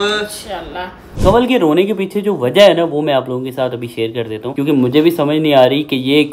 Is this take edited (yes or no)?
yes